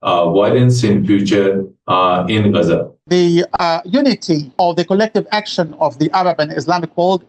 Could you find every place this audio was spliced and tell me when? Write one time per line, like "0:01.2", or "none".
0:03.0
0:04.5